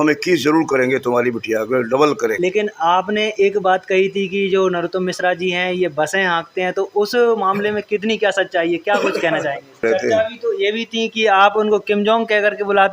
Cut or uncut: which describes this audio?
cut